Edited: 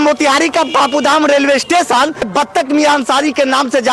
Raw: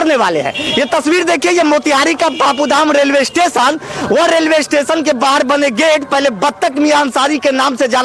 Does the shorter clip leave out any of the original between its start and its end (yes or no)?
yes